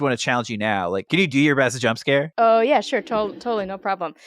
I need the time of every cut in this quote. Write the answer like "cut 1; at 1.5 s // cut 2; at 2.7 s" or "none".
cut 1; at 1.0 s // cut 2; at 2.3 s